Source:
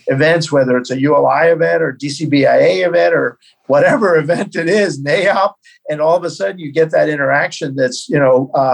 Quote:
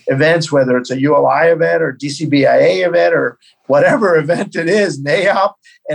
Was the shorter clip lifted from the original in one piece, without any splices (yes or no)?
yes